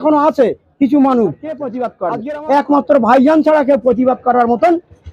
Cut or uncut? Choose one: cut